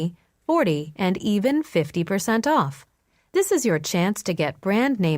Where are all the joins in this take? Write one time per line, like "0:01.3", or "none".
0:02.8